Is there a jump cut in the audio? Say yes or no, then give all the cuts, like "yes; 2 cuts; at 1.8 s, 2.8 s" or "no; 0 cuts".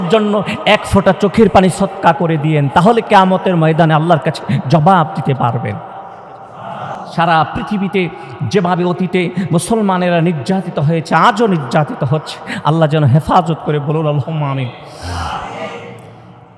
yes; 1 cut; at 7.0 s